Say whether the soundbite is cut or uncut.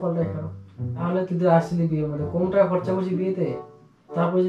cut